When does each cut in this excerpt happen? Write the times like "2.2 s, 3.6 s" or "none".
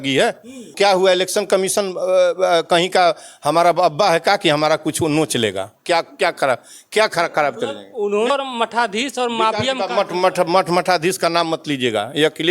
0.7 s, 8.3 s